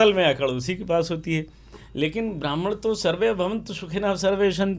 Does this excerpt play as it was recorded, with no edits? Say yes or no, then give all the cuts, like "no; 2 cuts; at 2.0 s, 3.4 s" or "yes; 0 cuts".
yes; 0 cuts